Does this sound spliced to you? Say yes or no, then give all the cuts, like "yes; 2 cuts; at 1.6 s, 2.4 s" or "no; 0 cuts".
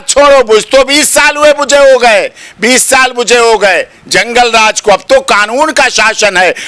no; 0 cuts